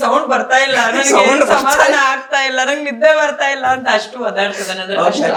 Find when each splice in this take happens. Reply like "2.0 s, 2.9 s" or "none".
none